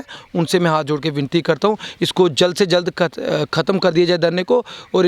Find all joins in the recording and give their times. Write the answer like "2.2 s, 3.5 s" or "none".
none